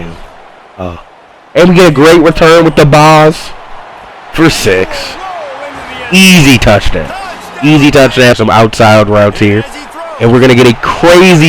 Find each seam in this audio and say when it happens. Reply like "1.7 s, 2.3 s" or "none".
8.3 s